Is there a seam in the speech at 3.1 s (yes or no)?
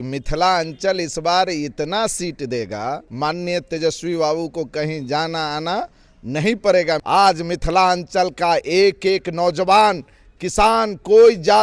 yes